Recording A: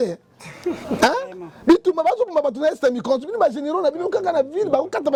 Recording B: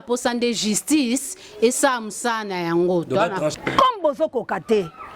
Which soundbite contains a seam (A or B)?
B